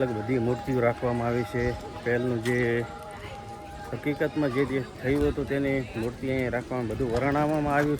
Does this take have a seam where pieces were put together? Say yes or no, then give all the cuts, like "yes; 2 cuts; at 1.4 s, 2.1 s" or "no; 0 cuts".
no; 0 cuts